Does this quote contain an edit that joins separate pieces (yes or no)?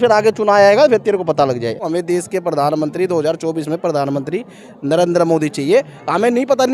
yes